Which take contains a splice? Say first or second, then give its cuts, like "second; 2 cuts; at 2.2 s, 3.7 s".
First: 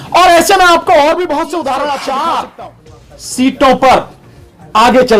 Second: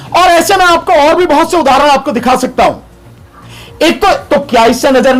first; 1 cut; at 1.9 s